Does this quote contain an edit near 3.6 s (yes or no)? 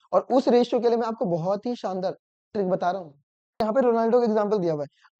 yes